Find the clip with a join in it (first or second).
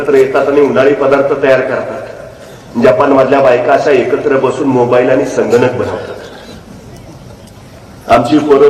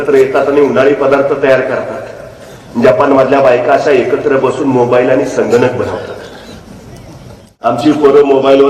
second